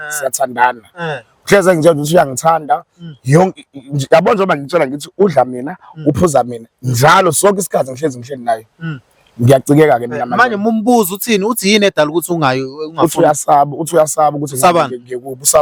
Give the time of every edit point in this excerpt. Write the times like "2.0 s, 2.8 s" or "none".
none